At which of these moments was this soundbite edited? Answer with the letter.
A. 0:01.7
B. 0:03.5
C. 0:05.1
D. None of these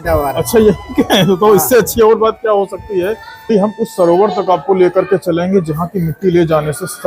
B